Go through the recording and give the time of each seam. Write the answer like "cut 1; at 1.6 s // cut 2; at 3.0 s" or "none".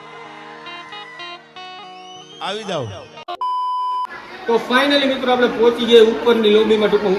none